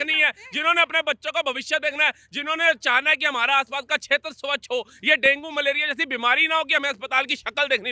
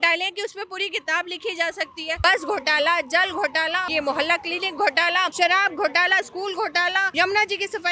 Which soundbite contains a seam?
second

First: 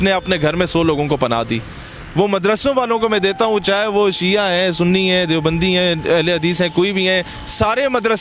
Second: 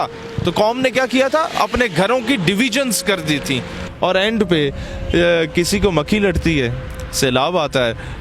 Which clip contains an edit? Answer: second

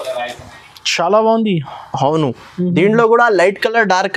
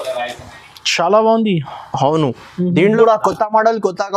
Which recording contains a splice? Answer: second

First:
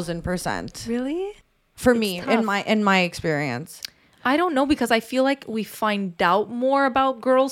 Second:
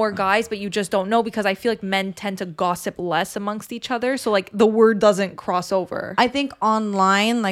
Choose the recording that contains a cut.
first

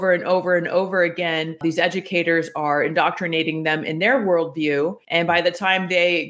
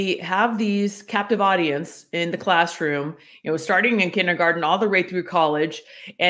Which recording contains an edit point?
first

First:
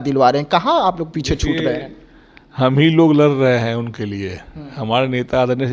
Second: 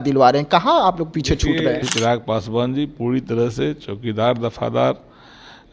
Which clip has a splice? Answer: second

